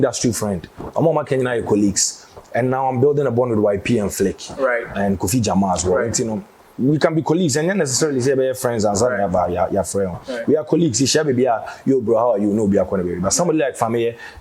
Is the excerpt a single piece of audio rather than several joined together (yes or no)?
yes